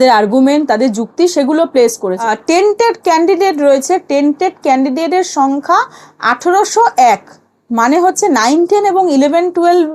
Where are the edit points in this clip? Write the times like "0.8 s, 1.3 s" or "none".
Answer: 2.3 s